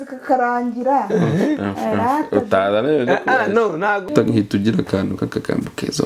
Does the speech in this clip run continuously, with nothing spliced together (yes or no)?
no